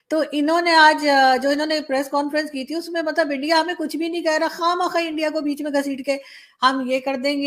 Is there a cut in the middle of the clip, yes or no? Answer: no